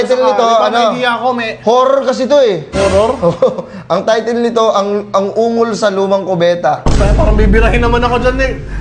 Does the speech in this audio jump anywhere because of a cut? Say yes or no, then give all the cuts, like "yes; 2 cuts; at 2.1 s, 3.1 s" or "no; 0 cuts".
no; 0 cuts